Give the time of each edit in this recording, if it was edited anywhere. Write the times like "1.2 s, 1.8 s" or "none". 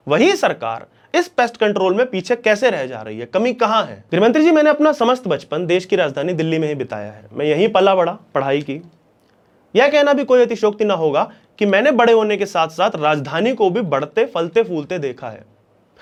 none